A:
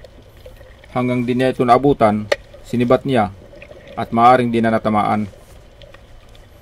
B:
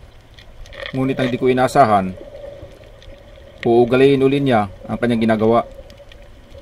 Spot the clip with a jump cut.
B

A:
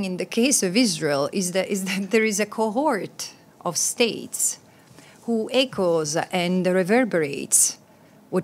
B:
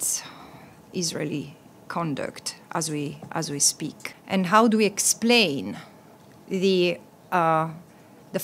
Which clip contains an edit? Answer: B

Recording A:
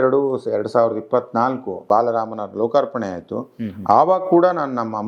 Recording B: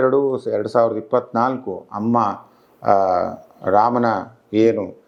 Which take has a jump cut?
A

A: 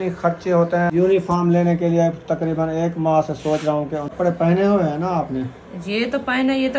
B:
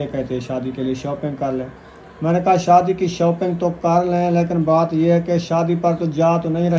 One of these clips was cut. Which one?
A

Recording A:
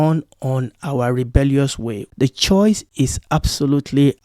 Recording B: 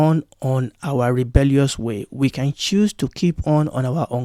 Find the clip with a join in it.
A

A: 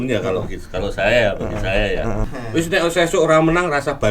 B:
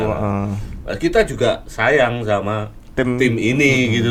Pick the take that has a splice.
A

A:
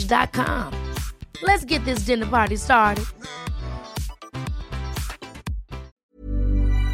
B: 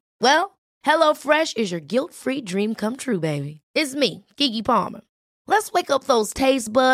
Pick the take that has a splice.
A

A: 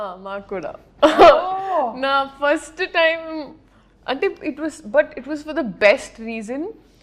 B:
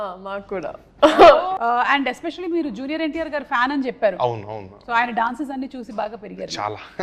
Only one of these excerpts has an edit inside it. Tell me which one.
B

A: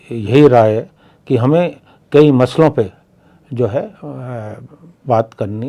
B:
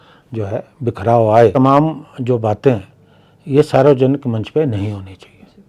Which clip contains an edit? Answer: B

